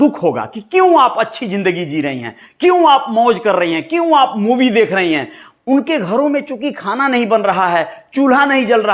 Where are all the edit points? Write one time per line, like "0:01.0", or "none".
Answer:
none